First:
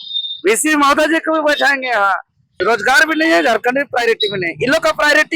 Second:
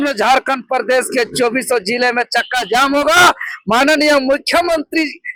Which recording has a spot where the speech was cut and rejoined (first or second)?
first